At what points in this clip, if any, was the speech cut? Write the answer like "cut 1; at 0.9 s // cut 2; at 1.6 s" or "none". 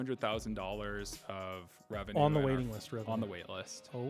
cut 1; at 2.1 s